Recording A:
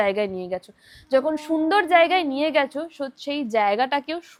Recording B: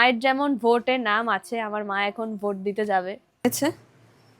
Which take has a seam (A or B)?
B